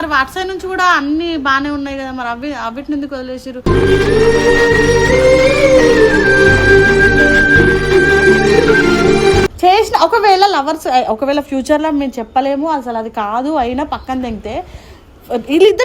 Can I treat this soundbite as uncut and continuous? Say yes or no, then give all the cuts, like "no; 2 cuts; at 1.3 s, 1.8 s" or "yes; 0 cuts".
no; 1 cut; at 9.5 s